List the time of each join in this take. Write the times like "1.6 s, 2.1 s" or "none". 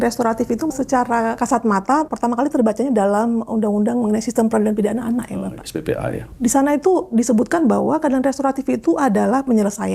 0.8 s, 2.1 s, 6.2 s